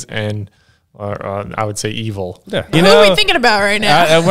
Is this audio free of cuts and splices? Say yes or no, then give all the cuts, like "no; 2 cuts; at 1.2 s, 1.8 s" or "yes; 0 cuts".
no; 1 cut; at 2.7 s